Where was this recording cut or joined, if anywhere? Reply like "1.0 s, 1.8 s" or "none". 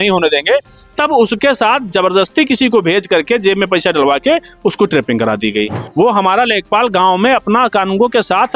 5.8 s